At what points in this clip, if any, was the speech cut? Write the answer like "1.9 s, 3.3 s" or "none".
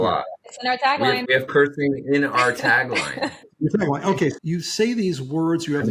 1.2 s, 3.4 s, 4.4 s